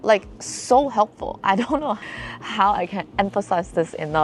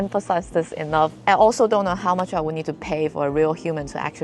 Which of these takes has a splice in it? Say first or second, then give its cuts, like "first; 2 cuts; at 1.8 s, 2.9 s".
first; 1 cut; at 2.0 s